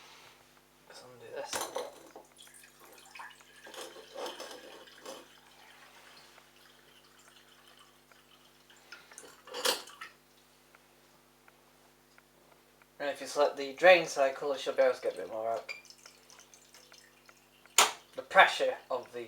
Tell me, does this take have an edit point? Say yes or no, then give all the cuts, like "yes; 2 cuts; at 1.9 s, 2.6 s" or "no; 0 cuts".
yes; 1 cut; at 6.9 s